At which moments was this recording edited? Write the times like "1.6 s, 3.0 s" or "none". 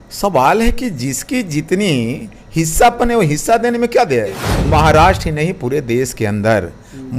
4.5 s